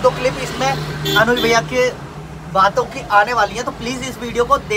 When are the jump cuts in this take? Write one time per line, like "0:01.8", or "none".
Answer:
none